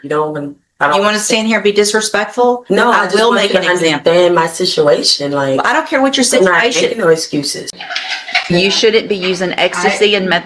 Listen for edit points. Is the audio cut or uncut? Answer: cut